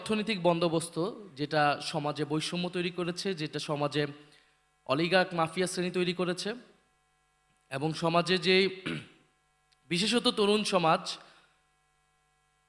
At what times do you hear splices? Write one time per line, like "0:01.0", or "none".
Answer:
none